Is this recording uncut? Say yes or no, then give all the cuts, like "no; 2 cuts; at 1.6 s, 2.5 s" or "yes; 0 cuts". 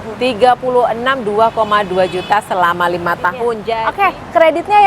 no; 1 cut; at 3.7 s